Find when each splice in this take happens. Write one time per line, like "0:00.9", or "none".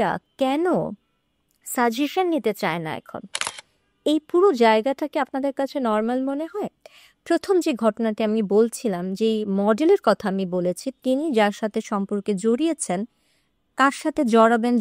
none